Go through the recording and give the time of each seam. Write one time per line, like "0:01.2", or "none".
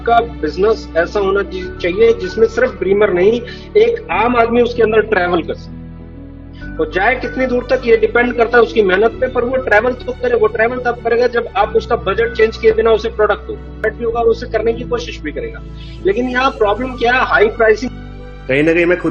0:13.8
0:17.9